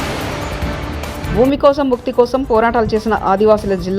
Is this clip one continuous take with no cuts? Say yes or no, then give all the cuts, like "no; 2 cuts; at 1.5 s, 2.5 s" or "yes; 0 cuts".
no; 1 cut; at 1.2 s